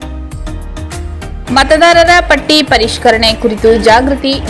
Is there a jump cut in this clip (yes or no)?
yes